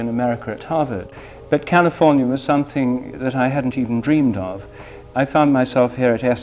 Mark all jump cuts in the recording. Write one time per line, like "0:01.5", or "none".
0:01.3
0:03.1